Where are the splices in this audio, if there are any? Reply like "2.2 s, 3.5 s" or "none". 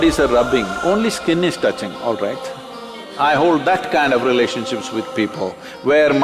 3.0 s

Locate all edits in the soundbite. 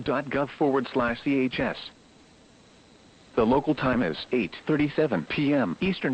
4.8 s

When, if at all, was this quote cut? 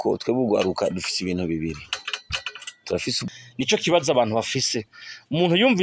3.2 s

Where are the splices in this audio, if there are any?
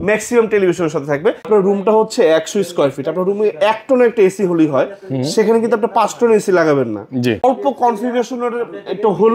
1.4 s, 7.4 s

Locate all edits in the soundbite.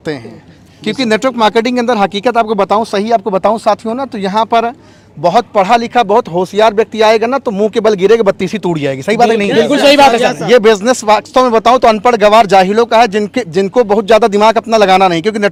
none

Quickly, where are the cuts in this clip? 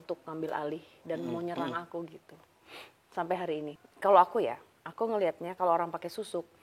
3.8 s

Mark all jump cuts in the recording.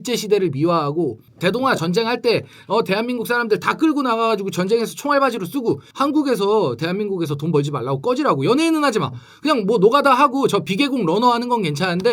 1.2 s, 5.9 s

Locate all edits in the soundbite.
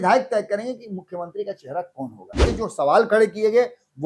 2.4 s

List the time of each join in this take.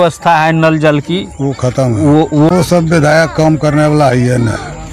2.5 s

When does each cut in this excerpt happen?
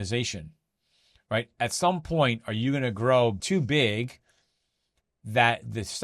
3.4 s

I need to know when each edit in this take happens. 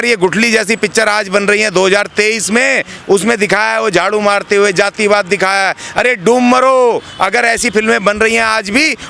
2.9 s

